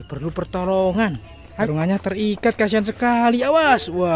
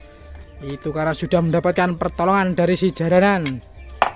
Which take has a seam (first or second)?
first